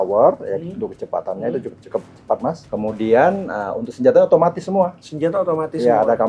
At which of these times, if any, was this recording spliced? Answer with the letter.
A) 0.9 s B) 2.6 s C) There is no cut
B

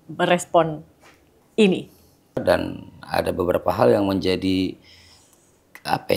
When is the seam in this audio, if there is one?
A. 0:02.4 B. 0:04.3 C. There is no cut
A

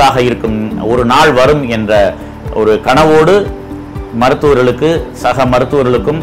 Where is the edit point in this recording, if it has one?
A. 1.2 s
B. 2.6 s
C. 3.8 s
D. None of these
D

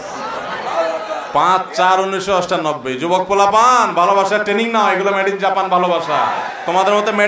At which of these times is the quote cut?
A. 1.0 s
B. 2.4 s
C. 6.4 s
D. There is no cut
C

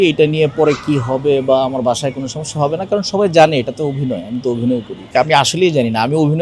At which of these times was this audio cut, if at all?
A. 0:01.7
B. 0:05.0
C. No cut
B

